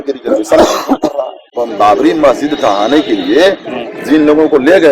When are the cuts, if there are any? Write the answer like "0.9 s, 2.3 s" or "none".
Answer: 1.6 s